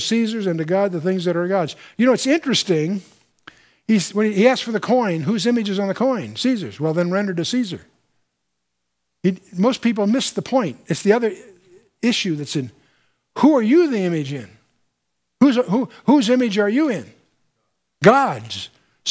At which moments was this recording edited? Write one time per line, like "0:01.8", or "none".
0:05.1